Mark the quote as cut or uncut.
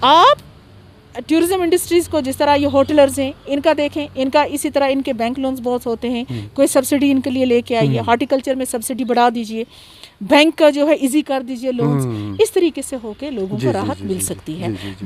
uncut